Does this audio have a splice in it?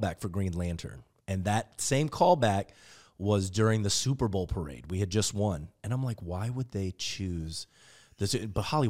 no; 0 cuts

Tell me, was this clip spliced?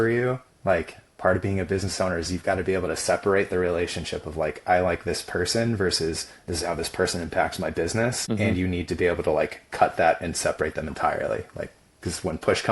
yes; 1 cut; at 8.6 s

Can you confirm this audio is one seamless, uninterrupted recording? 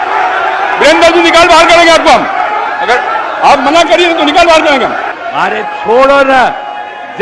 no; 1 cut; at 5.1 s

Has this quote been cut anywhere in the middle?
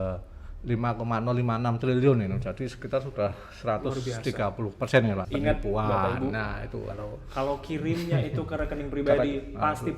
yes; 1 cut; at 5.2 s

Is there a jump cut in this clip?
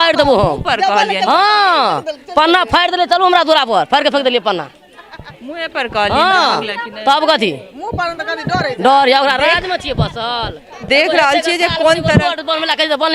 no; 0 cuts

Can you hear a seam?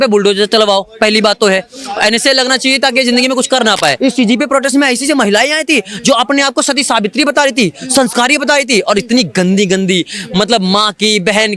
yes; 1 cut; at 4.0 s

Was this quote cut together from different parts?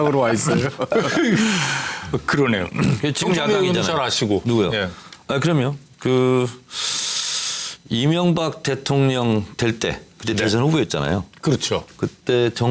yes; 1 cut; at 11.8 s

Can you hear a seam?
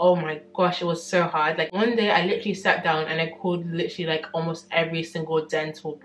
no; 0 cuts

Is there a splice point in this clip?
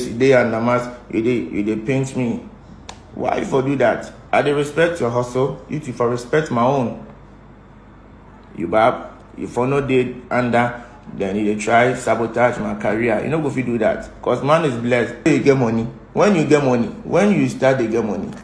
yes; 2 cuts; at 4.1 s, 15.3 s

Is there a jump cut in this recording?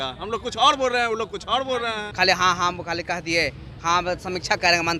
yes; 1 cut; at 2.1 s

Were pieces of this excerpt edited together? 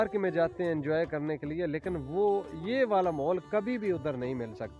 no; 0 cuts

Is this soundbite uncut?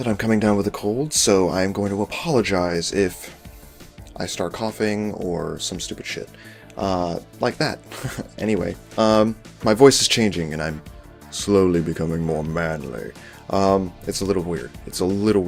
yes; 0 cuts

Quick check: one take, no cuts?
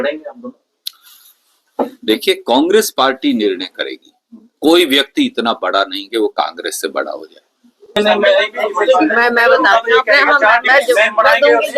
no; 1 cut; at 8.0 s

